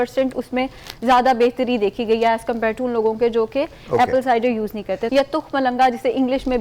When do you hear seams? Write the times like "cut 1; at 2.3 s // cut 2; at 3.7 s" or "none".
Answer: cut 1; at 5.0 s